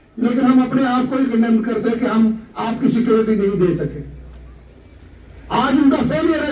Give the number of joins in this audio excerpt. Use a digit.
0